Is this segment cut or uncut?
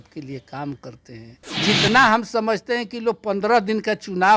cut